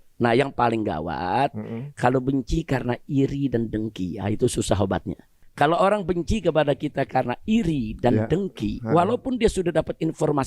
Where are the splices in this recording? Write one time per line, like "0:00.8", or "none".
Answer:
0:05.4